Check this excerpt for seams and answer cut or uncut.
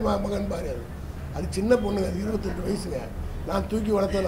uncut